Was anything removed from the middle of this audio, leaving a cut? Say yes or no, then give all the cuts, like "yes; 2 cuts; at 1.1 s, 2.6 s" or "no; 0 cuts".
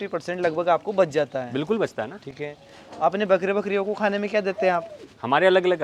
no; 0 cuts